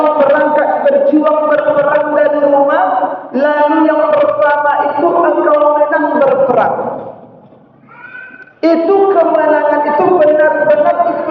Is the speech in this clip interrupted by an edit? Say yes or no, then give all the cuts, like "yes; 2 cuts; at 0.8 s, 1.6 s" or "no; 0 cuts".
no; 0 cuts